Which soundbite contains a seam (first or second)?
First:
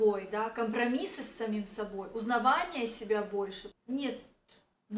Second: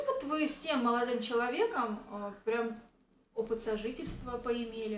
first